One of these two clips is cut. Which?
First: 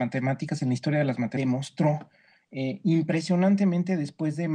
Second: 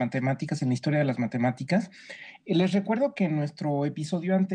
second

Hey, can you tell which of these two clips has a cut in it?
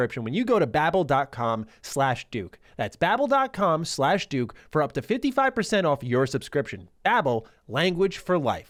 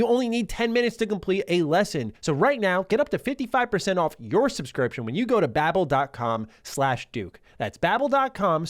second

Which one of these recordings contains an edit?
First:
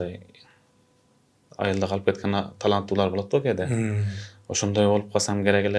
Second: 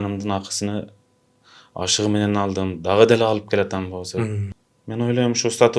second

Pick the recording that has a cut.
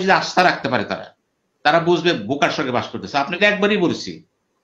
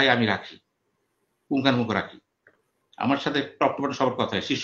first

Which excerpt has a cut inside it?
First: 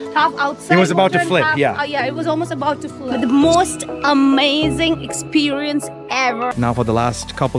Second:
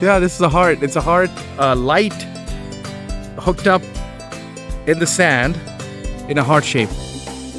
first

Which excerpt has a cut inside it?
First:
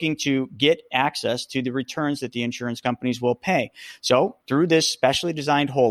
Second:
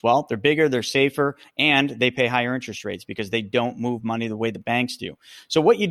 first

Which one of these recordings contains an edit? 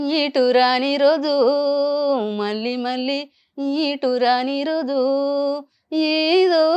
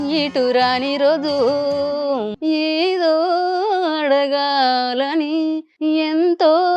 second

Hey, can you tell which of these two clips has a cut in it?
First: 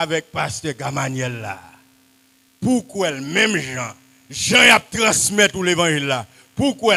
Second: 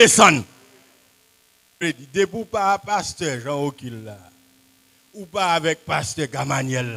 second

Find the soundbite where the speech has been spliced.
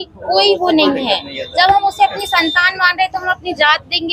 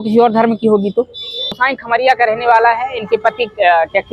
second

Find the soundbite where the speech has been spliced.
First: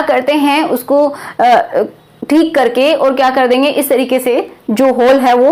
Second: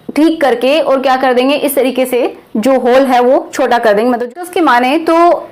second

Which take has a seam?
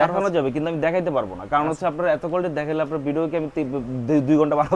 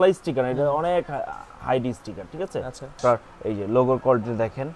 second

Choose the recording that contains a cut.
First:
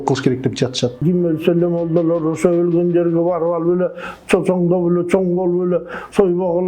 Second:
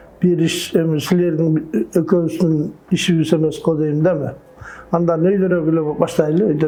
first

